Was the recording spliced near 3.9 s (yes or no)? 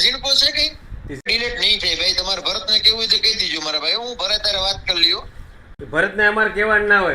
no